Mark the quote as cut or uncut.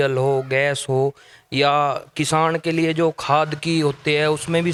uncut